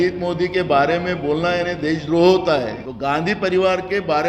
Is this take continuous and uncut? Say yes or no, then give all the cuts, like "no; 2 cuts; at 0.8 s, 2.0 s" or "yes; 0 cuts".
no; 1 cut; at 2.8 s